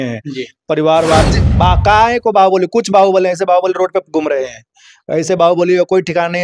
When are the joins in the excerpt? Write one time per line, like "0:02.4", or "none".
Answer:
0:01.3